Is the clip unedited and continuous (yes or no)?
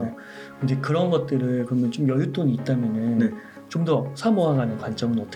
yes